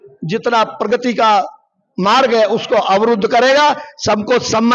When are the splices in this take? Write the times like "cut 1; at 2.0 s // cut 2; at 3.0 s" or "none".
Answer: none